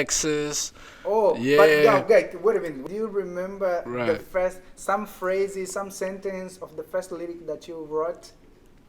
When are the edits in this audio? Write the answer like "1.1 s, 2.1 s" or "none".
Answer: 2.8 s